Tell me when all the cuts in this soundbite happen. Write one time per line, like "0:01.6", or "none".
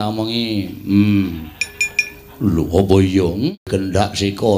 0:03.6